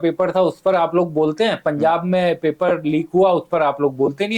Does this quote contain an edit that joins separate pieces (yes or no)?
no